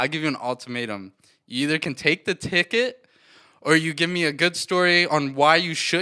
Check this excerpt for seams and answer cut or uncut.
uncut